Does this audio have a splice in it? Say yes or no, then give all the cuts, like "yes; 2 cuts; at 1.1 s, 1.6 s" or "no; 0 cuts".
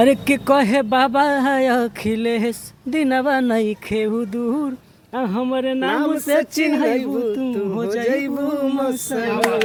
no; 0 cuts